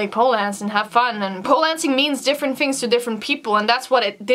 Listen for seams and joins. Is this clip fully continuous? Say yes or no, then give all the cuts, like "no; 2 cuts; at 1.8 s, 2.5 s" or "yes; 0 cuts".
no; 1 cut; at 1.4 s